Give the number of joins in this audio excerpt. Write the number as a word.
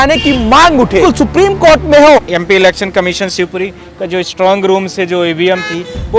two